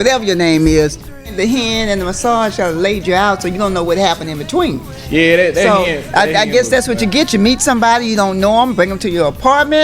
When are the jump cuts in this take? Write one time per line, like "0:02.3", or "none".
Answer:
0:01.1